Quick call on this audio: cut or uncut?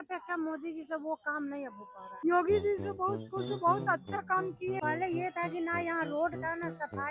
cut